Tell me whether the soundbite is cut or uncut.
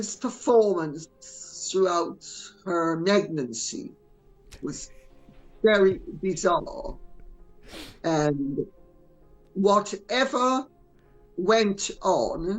uncut